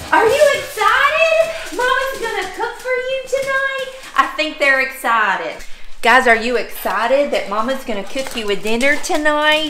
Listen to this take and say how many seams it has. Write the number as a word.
zero